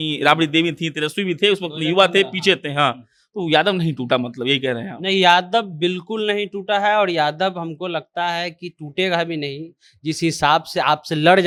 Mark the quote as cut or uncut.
uncut